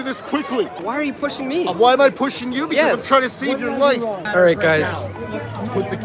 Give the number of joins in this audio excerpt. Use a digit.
2